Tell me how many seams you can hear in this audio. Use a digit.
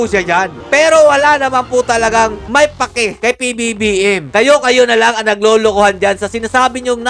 1